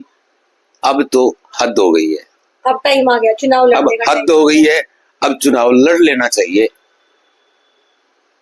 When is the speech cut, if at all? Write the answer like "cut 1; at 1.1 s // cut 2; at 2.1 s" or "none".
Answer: none